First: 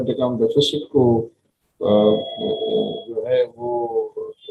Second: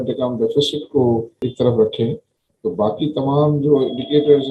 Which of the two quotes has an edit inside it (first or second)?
second